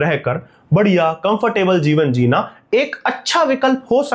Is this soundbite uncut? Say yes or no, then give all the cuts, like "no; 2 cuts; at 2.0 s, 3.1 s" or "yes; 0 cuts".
yes; 0 cuts